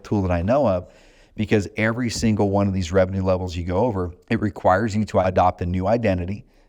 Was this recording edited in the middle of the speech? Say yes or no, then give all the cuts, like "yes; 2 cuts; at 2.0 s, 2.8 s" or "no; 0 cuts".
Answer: yes; 2 cuts; at 4.2 s, 5.2 s